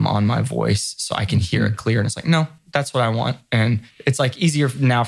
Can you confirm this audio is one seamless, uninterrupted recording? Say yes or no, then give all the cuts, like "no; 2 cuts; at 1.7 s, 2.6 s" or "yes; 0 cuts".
no; 1 cut; at 3.9 s